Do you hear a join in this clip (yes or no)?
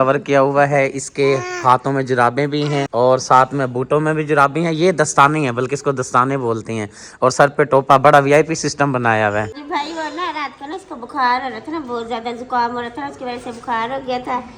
no